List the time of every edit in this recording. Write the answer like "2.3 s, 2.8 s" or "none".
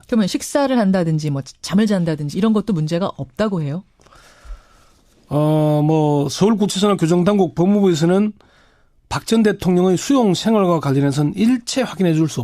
none